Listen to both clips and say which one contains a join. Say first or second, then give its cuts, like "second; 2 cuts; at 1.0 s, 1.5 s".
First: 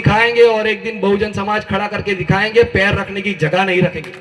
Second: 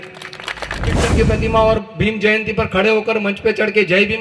second; 1 cut; at 1.1 s